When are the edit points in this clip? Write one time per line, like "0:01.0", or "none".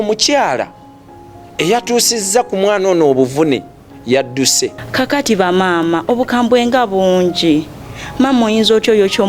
0:04.8

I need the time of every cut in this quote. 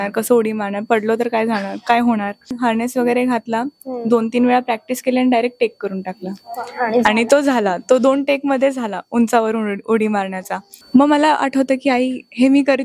0:02.5
0:10.7

